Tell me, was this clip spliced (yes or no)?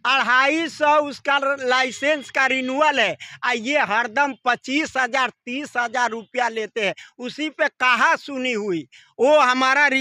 no